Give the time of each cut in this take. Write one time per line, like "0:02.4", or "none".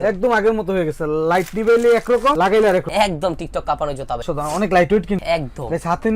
0:02.9